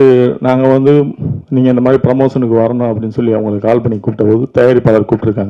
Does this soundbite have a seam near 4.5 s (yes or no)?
no